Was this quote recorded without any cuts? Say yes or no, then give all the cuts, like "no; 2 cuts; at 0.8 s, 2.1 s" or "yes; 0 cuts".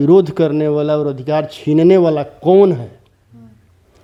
yes; 0 cuts